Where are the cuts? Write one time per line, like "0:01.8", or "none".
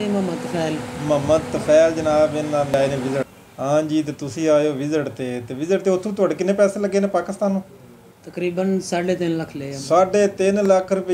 0:02.7